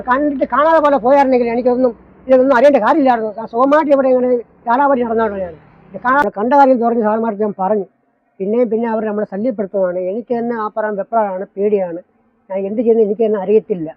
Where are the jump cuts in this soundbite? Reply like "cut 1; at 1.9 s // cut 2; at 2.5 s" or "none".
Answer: cut 1; at 6.2 s